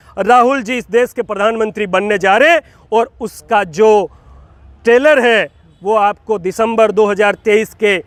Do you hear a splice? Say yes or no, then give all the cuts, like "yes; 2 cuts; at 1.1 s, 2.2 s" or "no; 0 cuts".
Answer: no; 0 cuts